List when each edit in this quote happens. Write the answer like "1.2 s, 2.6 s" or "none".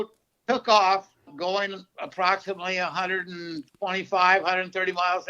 1.3 s